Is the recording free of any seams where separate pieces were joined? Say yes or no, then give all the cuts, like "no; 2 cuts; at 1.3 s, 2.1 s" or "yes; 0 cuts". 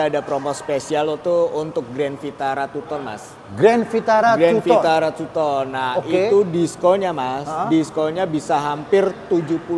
yes; 0 cuts